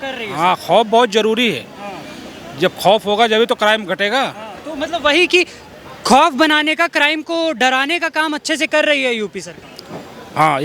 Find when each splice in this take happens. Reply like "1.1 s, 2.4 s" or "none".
none